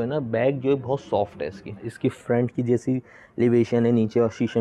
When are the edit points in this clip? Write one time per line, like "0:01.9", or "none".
0:01.7